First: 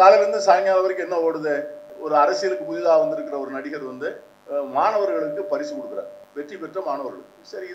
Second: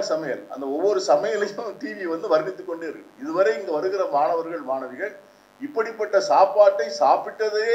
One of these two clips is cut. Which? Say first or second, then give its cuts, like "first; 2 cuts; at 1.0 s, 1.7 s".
first; 3 cuts; at 1.9 s, 4.3 s, 6.2 s